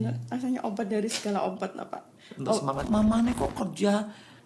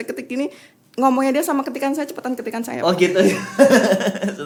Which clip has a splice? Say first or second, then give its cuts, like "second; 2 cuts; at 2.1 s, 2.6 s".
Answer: first; 1 cut; at 2.8 s